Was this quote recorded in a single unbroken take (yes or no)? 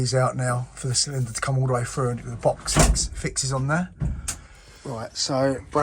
no